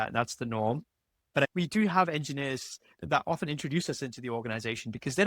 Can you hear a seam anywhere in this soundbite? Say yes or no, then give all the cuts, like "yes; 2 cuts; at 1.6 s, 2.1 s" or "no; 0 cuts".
yes; 2 cuts; at 1.4 s, 2.9 s